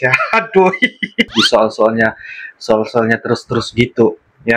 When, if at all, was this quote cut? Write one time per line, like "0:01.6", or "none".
0:01.3

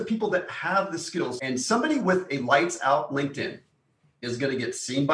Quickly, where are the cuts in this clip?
0:01.4

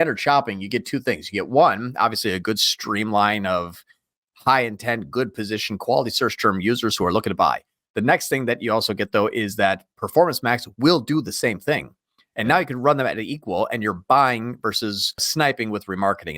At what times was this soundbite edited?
0:15.3

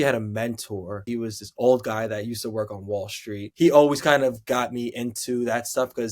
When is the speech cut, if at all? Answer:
0:01.0
0:03.5

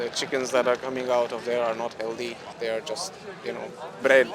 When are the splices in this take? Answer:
0:02.5

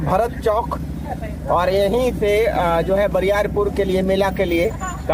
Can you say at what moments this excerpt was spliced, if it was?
none

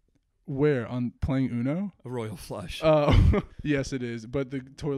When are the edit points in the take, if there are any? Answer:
0:03.5

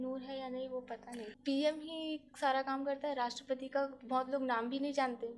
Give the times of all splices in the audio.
0:01.3

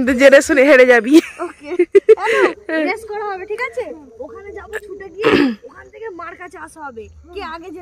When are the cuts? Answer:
none

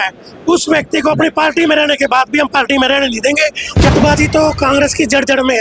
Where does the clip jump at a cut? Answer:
0:03.9

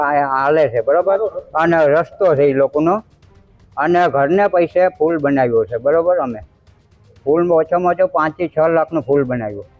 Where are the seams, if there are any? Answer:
none

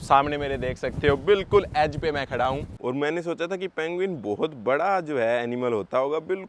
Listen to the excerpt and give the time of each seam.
0:02.7

